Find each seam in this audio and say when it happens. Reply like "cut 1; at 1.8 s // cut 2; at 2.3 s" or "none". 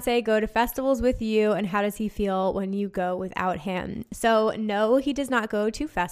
none